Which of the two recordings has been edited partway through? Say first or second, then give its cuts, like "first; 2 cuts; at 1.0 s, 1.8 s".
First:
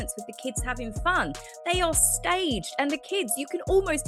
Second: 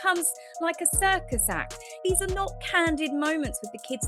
second; 1 cut; at 2.0 s